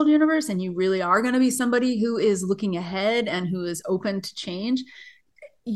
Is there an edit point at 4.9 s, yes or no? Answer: no